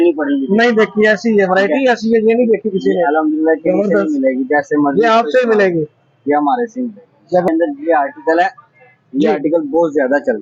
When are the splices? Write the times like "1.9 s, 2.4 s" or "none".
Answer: 7.5 s

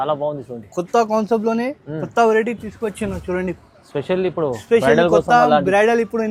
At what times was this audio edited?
none

